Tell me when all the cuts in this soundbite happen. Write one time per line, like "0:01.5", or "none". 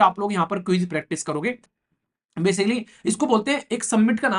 0:01.8